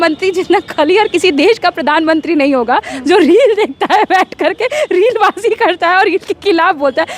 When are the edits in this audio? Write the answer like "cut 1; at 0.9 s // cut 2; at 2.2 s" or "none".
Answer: none